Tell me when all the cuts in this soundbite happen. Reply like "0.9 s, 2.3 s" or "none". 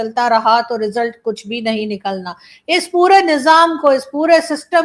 none